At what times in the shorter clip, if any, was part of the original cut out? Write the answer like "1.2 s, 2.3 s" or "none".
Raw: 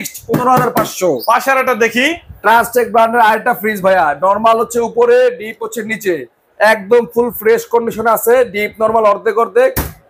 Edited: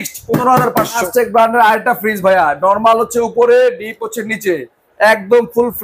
1.0 s